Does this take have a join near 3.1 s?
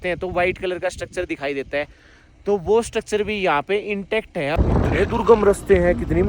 no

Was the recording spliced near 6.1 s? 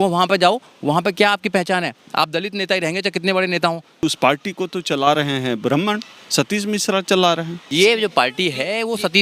no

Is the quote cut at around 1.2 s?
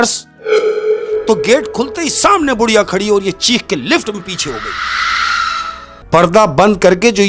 yes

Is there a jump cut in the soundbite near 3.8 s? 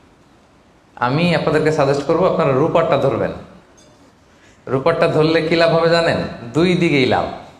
no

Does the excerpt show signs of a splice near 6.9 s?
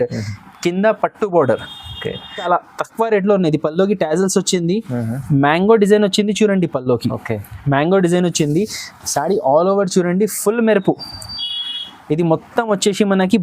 no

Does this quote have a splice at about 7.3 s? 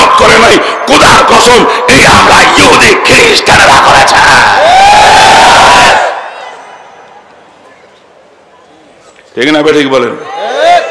no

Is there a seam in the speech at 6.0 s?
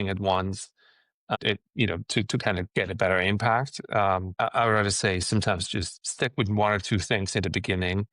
yes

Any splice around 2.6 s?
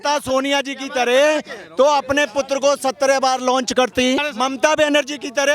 no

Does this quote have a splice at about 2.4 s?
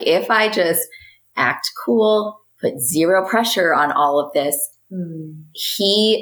no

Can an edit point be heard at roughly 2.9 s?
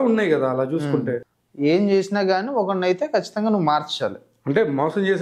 no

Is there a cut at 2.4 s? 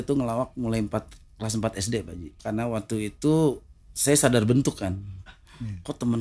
yes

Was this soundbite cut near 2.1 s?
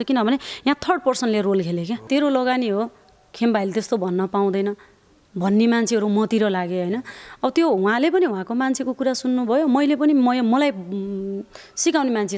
yes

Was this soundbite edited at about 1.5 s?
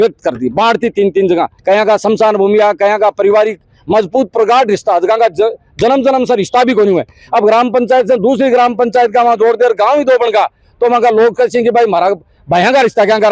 yes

